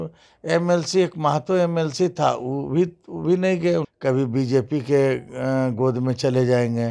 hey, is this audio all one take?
no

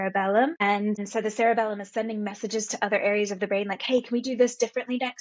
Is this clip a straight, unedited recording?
no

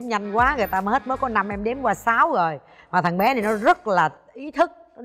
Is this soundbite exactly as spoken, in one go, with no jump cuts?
yes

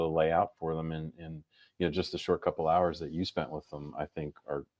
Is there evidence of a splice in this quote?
no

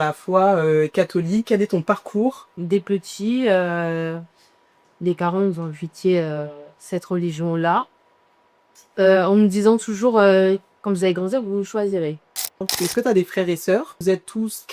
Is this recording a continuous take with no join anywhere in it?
no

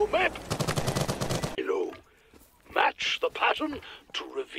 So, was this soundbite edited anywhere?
yes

